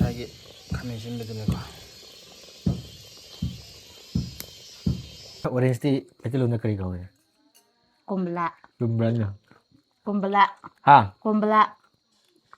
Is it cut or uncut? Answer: cut